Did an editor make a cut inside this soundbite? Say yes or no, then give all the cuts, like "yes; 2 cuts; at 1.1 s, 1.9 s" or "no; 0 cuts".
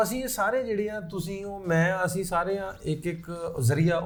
no; 0 cuts